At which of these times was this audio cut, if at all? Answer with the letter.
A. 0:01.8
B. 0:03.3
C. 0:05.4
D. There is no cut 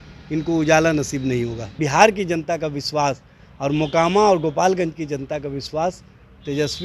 A